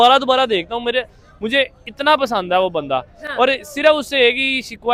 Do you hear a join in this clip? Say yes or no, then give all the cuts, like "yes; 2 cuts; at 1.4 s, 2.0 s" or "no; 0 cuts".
no; 0 cuts